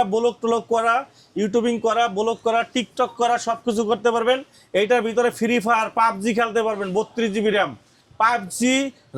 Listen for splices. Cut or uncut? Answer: uncut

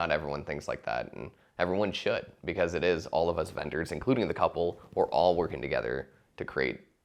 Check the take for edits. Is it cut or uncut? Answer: uncut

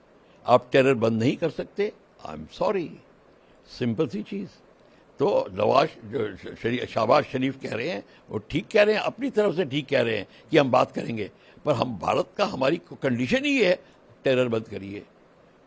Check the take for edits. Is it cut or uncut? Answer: uncut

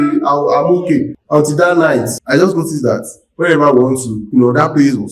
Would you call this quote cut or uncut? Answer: cut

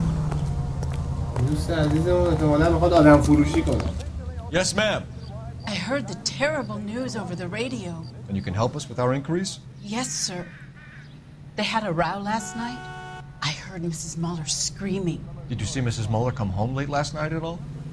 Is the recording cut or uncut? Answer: uncut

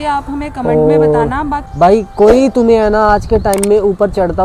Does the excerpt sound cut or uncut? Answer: cut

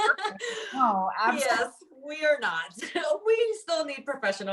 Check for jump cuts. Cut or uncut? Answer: uncut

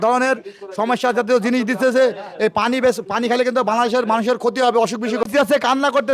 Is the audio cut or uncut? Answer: cut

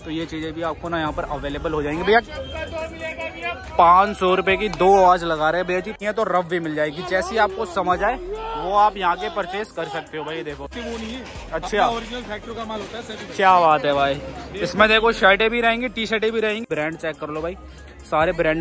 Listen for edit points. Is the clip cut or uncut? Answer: cut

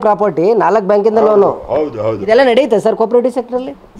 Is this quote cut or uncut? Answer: uncut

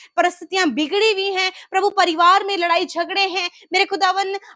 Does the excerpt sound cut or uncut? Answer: uncut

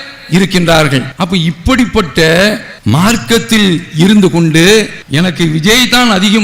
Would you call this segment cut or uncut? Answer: cut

